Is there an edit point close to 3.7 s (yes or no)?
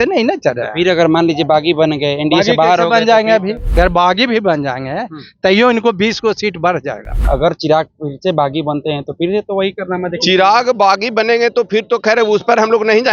yes